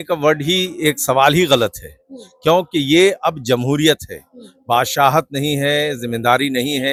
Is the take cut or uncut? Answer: uncut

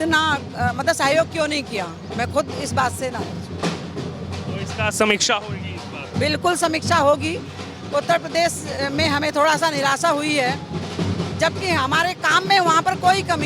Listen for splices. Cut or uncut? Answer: uncut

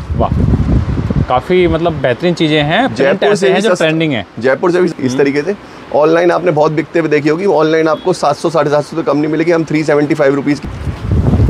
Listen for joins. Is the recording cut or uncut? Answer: cut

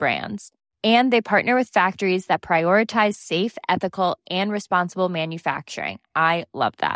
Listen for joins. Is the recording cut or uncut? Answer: uncut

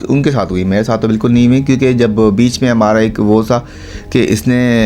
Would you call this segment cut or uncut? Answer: uncut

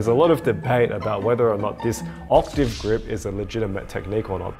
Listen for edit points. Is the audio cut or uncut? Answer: uncut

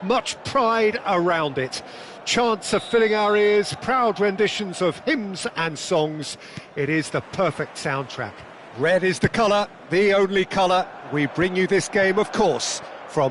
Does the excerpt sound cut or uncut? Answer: cut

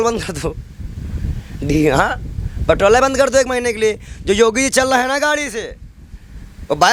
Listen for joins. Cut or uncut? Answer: uncut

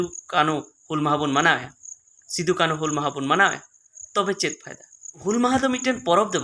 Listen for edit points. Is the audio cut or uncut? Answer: cut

